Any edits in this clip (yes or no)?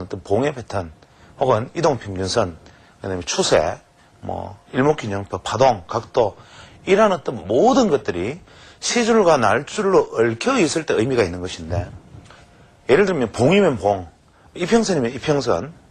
no